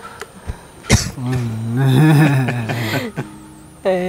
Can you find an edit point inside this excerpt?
no; 0 cuts

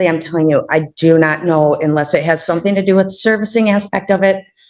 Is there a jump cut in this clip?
no; 0 cuts

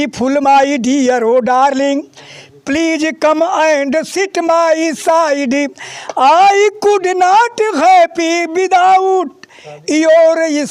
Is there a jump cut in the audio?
no; 0 cuts

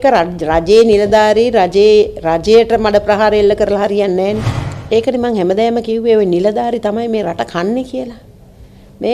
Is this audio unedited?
no; 1 cut; at 4.5 s

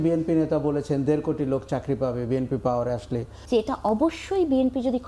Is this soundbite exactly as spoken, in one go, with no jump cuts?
no; 1 cut; at 3.3 s

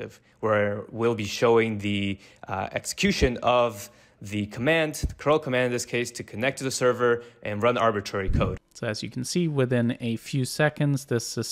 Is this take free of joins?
no; 1 cut; at 8.7 s

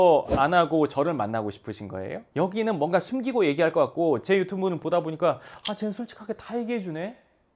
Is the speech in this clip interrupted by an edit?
yes; 1 cut; at 2.2 s

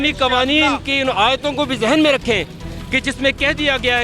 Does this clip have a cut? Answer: no; 0 cuts

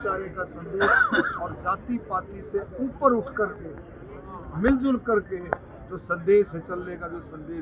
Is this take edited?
no; 0 cuts

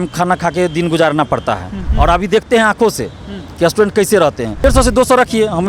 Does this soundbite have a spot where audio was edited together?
yes; 2 cuts; at 1.8 s, 4.6 s

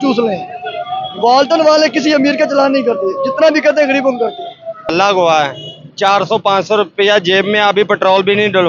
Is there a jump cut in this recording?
yes; 1 cut; at 4.9 s

